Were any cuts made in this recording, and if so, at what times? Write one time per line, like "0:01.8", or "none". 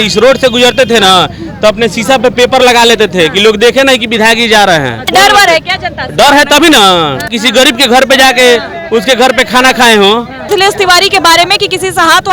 0:05.0
0:07.3
0:10.4